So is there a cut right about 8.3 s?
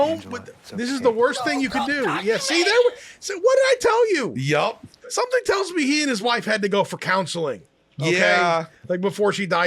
no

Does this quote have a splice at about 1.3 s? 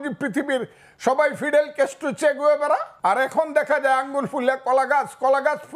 no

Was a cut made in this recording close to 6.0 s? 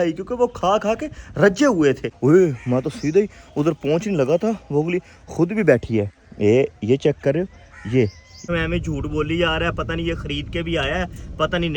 no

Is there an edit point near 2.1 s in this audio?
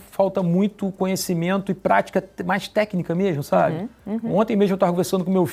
no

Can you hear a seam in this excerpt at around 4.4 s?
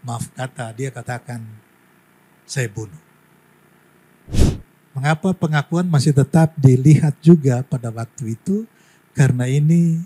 yes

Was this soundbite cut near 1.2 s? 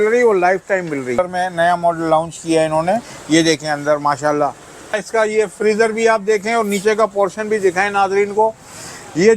yes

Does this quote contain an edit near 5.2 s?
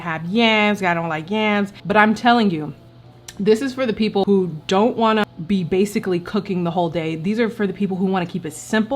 yes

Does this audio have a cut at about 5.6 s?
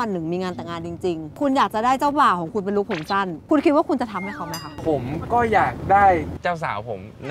no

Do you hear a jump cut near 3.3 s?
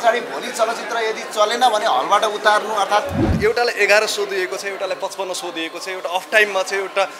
yes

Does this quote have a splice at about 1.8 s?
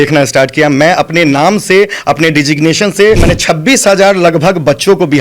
no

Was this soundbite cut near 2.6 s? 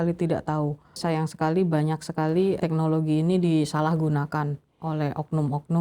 yes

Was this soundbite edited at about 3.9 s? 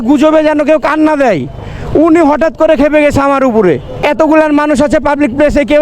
yes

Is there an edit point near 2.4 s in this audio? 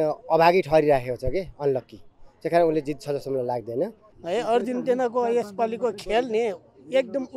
no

